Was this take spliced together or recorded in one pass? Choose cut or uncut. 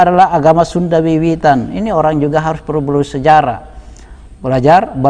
uncut